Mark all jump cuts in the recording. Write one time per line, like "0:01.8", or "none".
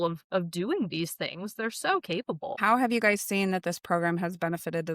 0:02.5